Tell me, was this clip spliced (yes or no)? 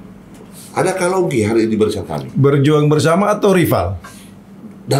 no